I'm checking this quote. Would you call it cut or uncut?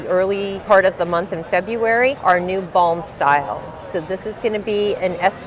uncut